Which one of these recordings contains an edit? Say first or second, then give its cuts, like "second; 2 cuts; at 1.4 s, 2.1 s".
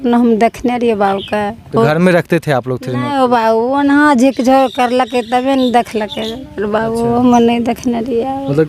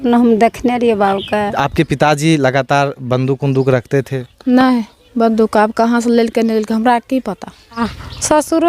second; 2 cuts; at 1.6 s, 7.8 s